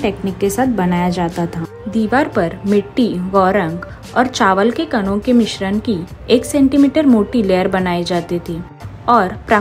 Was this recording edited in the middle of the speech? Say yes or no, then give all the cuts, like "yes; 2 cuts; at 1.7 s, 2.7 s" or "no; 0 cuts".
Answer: no; 0 cuts